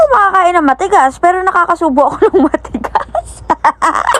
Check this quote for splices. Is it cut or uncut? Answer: uncut